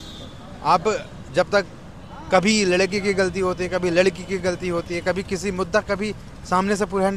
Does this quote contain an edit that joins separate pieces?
no; 0 cuts

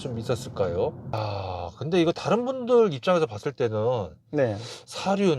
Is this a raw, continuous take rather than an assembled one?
no; 1 cut; at 1.2 s

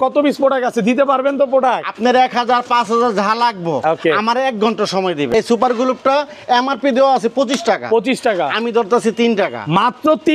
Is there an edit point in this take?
yes; 1 cut; at 5.3 s

